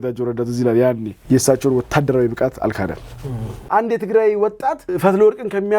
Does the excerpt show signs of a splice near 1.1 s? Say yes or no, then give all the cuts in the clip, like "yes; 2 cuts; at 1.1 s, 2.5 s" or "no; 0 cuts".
no; 1 cut; at 3.6 s